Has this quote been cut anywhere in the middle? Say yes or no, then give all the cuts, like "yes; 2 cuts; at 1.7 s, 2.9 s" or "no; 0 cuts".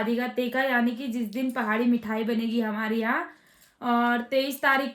no; 0 cuts